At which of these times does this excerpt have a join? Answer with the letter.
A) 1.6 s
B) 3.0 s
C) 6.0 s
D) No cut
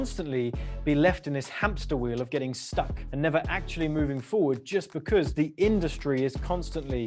B